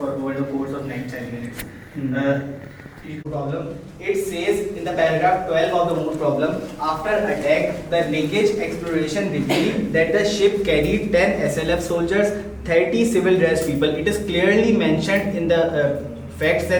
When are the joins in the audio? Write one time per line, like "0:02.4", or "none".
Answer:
none